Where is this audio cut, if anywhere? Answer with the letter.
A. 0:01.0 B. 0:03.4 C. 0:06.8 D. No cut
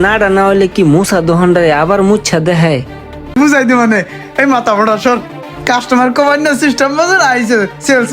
B